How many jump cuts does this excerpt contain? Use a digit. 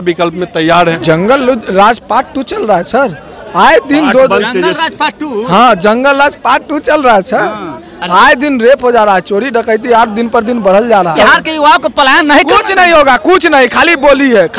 2